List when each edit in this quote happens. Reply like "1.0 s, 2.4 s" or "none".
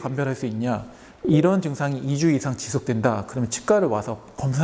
none